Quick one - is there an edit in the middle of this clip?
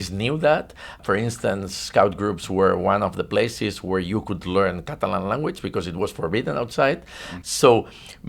yes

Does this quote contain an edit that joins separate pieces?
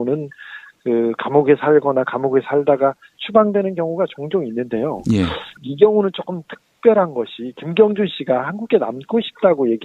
no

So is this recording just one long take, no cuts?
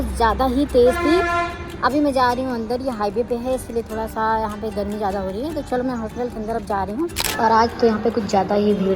no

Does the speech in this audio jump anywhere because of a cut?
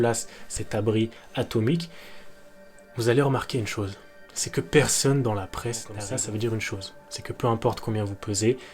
yes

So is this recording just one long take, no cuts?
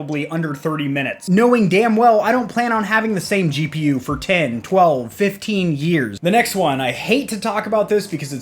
no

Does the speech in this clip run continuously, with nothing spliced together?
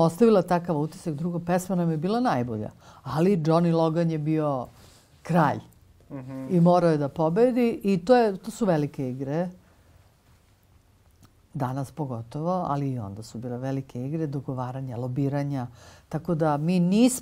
yes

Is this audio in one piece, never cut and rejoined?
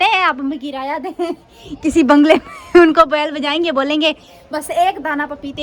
yes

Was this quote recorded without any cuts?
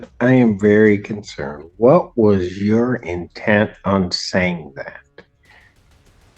no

